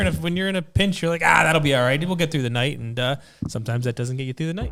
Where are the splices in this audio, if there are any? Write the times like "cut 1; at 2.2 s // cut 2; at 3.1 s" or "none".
none